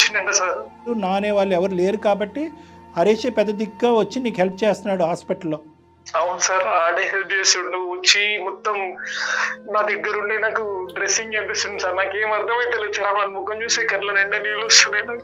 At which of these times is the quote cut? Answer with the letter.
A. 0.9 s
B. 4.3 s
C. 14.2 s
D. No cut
A